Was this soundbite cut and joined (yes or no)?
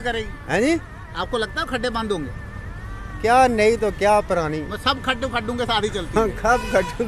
no